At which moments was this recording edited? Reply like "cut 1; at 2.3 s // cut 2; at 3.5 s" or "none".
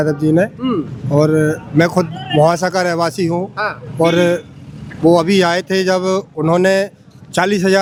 none